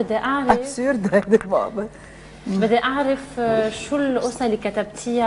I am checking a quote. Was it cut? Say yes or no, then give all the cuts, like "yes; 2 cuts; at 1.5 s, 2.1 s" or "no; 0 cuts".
no; 0 cuts